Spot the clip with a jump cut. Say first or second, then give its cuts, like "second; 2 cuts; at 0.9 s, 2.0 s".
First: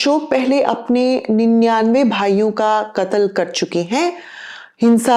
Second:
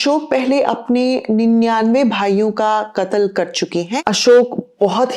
second; 1 cut; at 3.9 s